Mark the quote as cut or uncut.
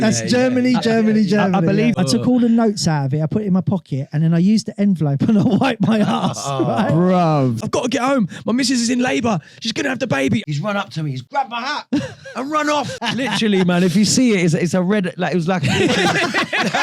cut